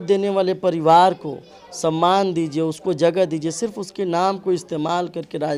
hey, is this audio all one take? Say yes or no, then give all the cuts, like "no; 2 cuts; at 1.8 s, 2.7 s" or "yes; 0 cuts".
yes; 0 cuts